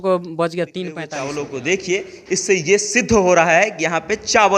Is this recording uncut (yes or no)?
no